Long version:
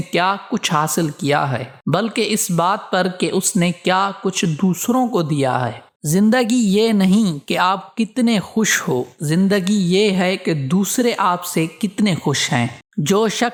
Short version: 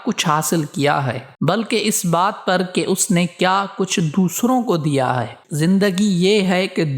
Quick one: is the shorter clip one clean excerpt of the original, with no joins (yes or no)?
no